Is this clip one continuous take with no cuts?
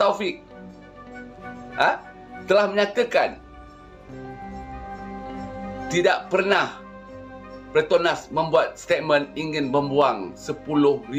yes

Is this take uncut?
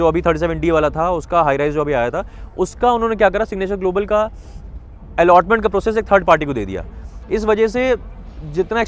yes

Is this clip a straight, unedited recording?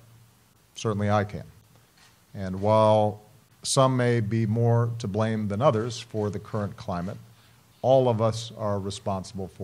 yes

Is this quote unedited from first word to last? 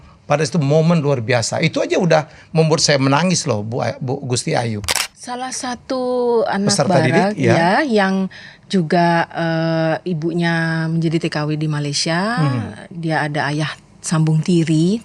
no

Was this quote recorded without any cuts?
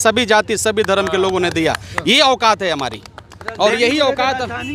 yes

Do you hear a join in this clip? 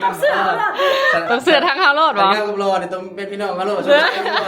no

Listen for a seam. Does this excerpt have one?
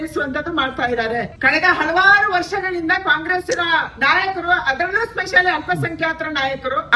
yes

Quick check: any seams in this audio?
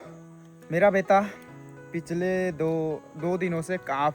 no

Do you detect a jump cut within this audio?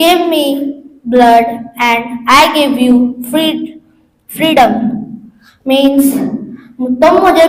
no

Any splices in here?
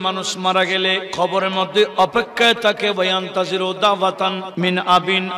yes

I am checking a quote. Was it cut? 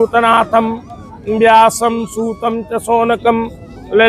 no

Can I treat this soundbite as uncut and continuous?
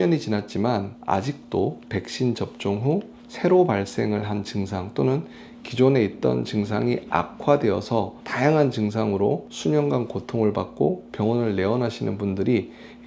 yes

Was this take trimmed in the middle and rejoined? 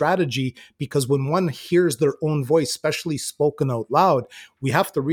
no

